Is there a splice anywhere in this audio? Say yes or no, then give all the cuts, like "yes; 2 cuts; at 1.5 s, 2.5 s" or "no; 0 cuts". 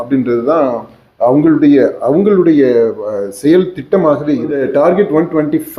yes; 1 cut; at 4.6 s